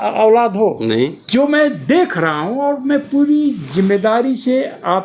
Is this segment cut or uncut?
cut